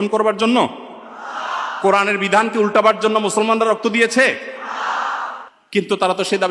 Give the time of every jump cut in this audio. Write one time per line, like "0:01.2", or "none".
none